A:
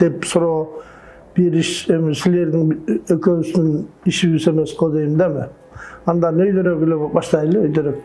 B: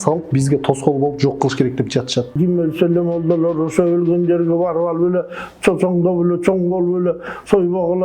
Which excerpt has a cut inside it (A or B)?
B